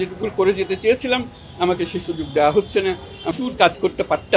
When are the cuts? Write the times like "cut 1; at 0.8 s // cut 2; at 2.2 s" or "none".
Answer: cut 1; at 3.3 s